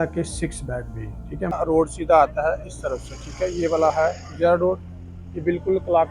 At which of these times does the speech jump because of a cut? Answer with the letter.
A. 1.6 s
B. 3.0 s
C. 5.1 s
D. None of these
A